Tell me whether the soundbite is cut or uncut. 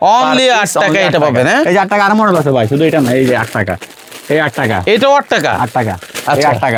uncut